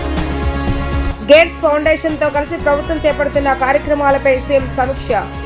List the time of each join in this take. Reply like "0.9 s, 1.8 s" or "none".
1.1 s